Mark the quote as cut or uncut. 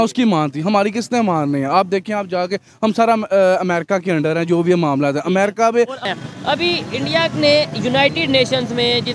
cut